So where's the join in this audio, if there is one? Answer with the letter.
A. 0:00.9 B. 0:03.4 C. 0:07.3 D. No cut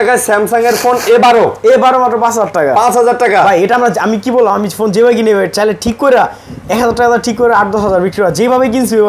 D